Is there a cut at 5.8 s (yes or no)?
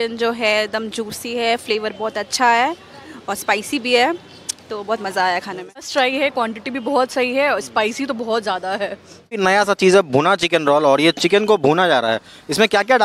yes